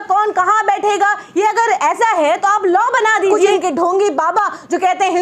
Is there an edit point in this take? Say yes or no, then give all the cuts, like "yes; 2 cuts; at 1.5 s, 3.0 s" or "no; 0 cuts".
yes; 1 cut; at 3.4 s